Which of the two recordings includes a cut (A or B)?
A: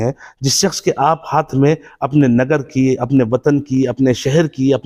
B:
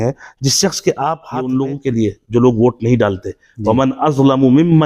B